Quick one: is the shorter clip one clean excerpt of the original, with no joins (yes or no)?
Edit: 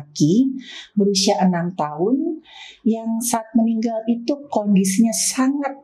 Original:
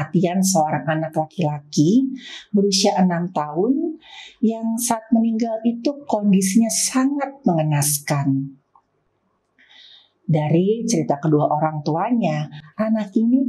yes